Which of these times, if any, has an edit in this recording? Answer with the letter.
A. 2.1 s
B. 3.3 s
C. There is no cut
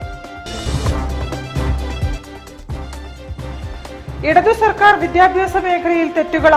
B